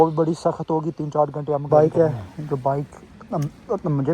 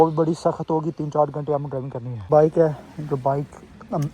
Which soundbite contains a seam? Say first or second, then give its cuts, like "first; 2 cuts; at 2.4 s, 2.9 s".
first; 1 cut; at 1.6 s